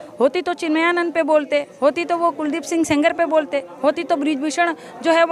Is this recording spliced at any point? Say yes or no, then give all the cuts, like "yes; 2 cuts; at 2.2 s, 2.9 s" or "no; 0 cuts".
no; 0 cuts